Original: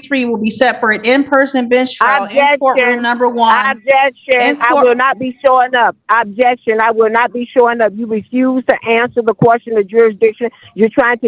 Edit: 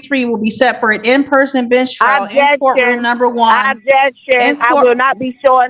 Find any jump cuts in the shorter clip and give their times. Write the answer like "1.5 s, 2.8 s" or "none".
none